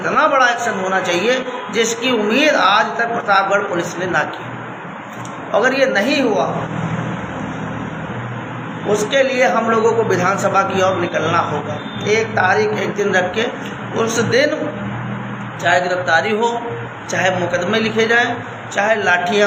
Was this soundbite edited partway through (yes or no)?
no